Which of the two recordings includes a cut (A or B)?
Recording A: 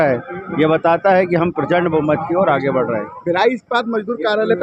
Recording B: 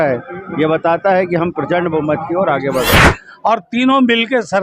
B